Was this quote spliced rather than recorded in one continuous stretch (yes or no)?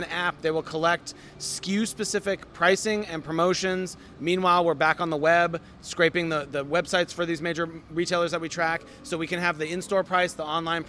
no